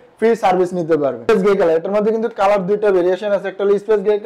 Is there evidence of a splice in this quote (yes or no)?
yes